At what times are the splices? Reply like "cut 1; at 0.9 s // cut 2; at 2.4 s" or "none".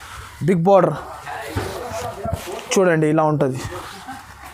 none